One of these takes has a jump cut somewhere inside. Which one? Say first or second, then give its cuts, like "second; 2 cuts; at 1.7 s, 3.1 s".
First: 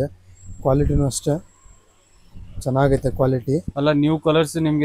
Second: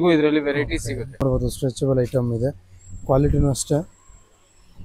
second; 1 cut; at 1.2 s